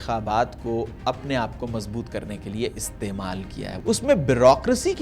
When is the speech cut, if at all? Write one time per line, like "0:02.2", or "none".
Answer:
0:03.6